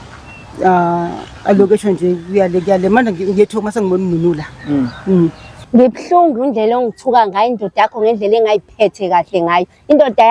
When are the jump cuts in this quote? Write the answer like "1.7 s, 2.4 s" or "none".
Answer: 5.5 s